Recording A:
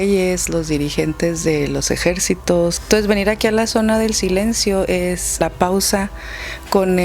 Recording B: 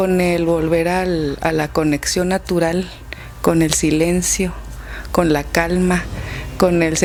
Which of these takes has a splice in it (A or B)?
A